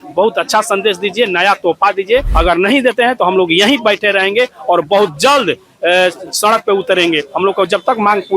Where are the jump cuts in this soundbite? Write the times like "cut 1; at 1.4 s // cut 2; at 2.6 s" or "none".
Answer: cut 1; at 2.3 s